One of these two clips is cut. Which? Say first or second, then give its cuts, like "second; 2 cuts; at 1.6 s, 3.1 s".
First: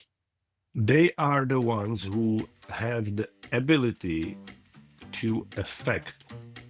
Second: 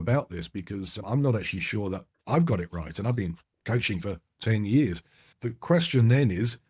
second; 2 cuts; at 1.0 s, 5.2 s